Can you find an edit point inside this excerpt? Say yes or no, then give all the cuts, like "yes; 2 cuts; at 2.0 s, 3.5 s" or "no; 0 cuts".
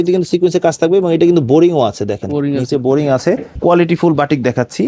yes; 1 cut; at 3.6 s